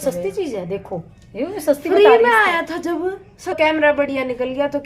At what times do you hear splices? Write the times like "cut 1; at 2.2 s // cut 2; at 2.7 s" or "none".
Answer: cut 1; at 3.6 s